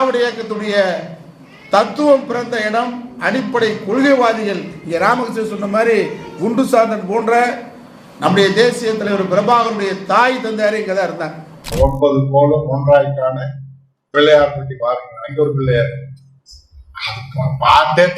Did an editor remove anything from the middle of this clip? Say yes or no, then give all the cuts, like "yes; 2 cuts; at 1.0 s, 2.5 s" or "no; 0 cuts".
yes; 1 cut; at 11.7 s